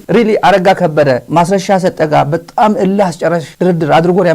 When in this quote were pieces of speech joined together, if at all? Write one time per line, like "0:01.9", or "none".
0:01.3
0:03.5